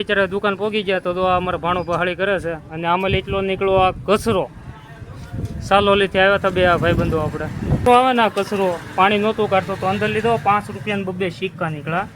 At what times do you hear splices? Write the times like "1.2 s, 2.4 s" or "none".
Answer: 7.8 s